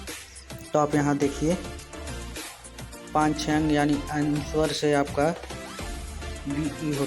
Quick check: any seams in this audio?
yes; 2 cuts; at 1.6 s, 3.1 s

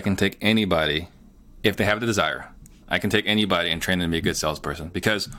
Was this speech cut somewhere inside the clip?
no; 0 cuts

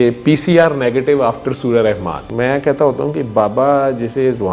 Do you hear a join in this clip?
yes; 1 cut; at 2.2 s

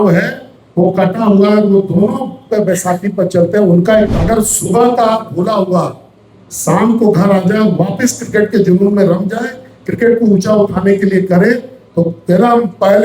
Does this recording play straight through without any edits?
no; 1 cut; at 4.2 s

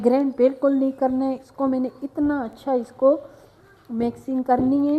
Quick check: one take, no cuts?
yes; 0 cuts

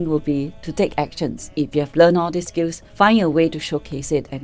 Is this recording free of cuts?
no; 2 cuts; at 1.5 s, 2.8 s

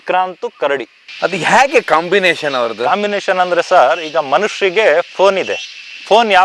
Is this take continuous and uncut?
no; 1 cut; at 1.0 s

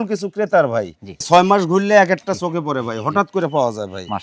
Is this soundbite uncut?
yes; 0 cuts

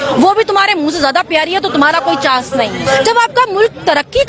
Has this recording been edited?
yes; 1 cut; at 2.8 s

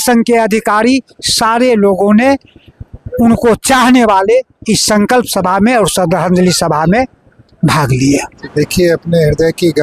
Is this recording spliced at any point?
yes; 1 cut; at 8.3 s

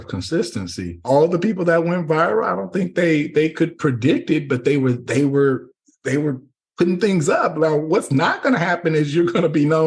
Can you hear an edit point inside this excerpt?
yes; 1 cut; at 1.0 s

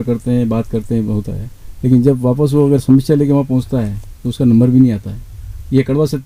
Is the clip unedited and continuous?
yes; 0 cuts

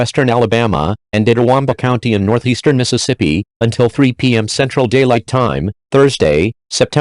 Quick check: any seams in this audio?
yes; 1 cut; at 1.0 s

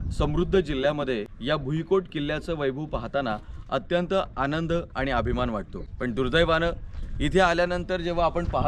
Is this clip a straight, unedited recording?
no; 2 cuts; at 1.3 s, 5.8 s

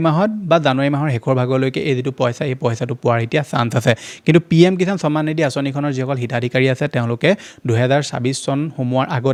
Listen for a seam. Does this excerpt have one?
no; 0 cuts

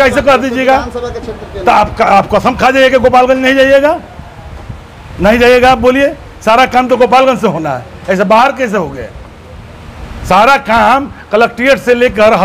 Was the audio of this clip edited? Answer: no; 0 cuts

